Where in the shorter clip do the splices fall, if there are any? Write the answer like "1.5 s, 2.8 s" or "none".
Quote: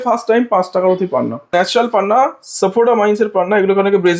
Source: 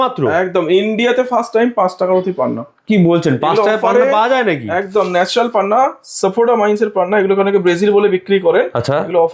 1.5 s